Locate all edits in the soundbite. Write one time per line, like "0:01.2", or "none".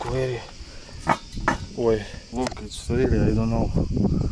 0:02.2